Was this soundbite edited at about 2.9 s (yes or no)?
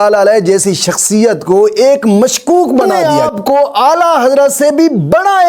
yes